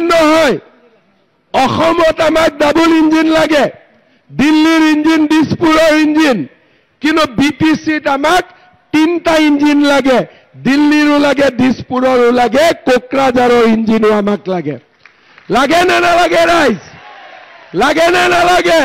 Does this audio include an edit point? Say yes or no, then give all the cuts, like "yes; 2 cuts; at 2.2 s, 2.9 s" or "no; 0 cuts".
no; 0 cuts